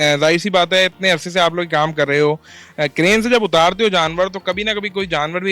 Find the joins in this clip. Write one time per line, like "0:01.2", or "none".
none